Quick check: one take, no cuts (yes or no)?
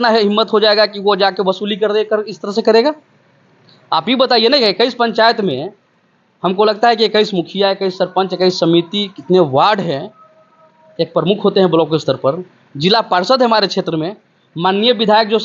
yes